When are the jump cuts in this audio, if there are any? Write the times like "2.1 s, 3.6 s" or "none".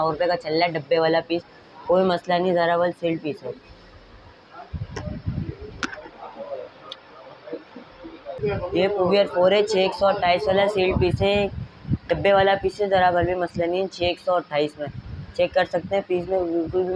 none

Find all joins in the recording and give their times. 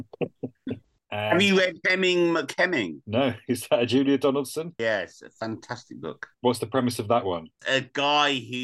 1.0 s, 3.0 s, 4.8 s, 6.4 s, 7.5 s

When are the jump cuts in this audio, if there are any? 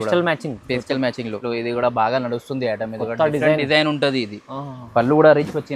1.4 s

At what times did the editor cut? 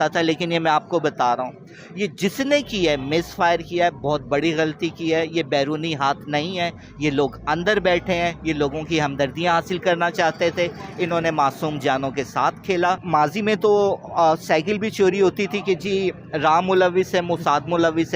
13.0 s

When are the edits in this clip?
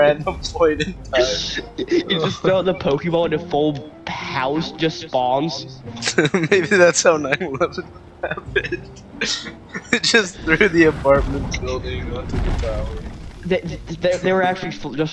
none

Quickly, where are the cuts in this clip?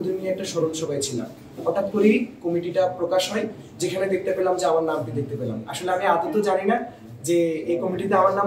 none

